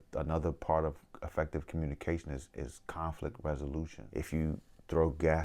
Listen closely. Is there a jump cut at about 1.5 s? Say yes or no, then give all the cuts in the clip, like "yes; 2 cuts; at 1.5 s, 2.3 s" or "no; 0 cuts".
no; 1 cut; at 4.0 s